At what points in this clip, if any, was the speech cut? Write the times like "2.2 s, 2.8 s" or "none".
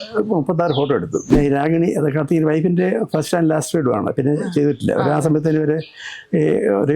1.3 s